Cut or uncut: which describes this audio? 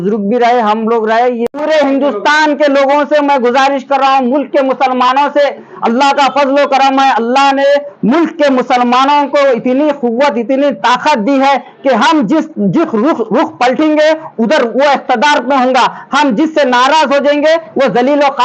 cut